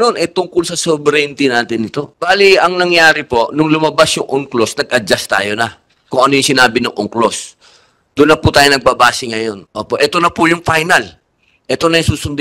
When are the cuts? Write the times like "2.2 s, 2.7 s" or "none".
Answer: 2.1 s, 9.7 s